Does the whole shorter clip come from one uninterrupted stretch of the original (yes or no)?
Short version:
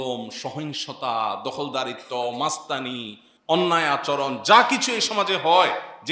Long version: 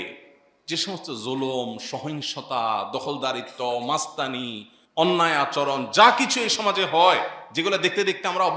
yes